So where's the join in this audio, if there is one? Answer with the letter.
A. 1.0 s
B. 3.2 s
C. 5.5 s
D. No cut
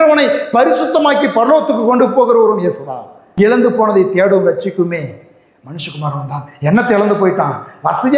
B